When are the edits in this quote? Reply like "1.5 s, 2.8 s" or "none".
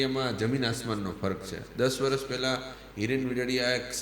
none